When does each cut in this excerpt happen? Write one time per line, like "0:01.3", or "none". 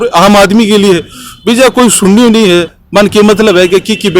0:02.8